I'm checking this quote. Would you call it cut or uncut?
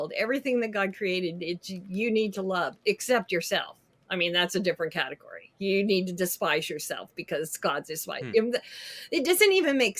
uncut